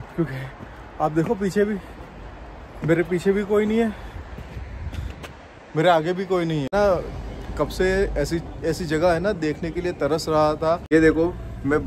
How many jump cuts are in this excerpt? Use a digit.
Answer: 2